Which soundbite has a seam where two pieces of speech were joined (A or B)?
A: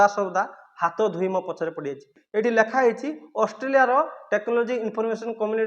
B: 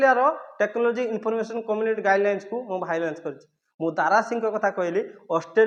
A